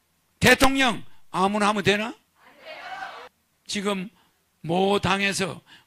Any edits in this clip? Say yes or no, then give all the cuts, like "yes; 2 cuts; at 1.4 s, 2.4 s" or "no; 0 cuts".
yes; 1 cut; at 3.3 s